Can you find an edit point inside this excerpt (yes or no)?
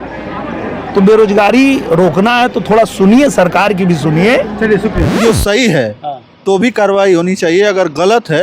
yes